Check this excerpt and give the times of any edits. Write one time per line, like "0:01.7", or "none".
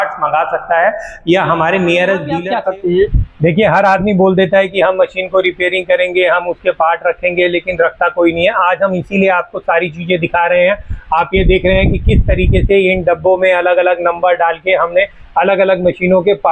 0:02.4